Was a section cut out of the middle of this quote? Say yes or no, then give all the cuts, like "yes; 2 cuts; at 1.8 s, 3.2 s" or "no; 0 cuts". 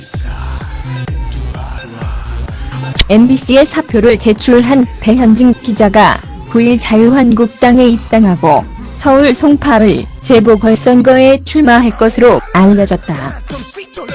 no; 0 cuts